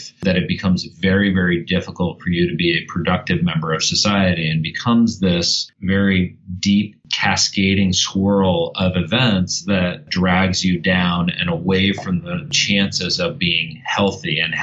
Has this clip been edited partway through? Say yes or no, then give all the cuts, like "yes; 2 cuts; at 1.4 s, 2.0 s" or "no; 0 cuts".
yes; 2 cuts; at 10.1 s, 12.5 s